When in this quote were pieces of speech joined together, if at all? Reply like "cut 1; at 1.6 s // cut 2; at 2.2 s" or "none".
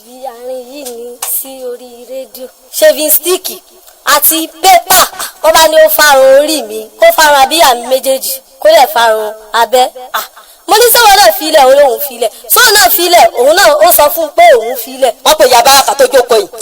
cut 1; at 2.6 s // cut 2; at 15.2 s